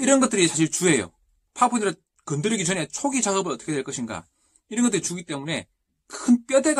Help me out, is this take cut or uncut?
cut